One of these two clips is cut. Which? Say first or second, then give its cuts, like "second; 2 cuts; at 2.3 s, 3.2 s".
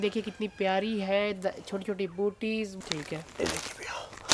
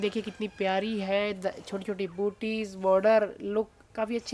first; 1 cut; at 2.7 s